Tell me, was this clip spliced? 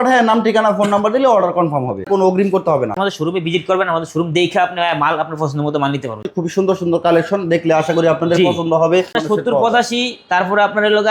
yes; 4 cuts; at 2.1 s, 3.0 s, 6.3 s, 9.2 s

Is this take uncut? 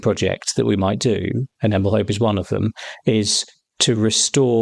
yes; 0 cuts

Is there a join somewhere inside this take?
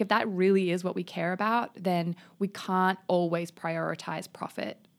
no; 0 cuts

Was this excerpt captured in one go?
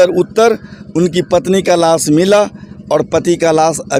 yes; 0 cuts

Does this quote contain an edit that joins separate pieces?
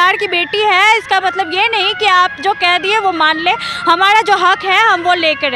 no; 0 cuts

